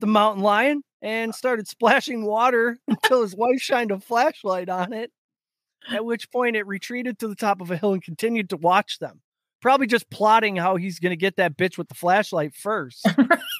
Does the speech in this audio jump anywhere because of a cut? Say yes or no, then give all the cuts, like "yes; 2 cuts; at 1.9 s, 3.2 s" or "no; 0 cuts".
no; 0 cuts